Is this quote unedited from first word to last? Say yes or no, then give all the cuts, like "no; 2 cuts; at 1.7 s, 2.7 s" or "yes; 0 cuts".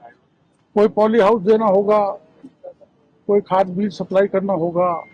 yes; 0 cuts